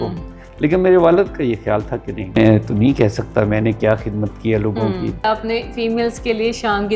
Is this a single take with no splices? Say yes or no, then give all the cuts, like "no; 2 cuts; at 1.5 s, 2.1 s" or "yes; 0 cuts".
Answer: no; 2 cuts; at 2.4 s, 5.2 s